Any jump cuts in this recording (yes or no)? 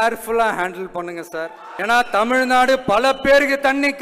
yes